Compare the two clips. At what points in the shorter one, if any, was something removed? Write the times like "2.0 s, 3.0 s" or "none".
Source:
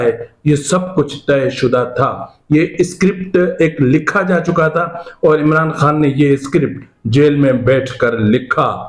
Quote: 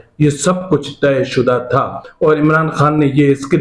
2.0 s